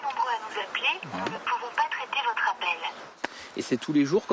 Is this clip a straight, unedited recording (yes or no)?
no